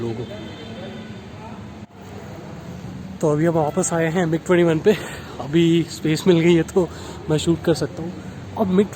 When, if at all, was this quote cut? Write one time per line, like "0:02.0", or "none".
0:01.8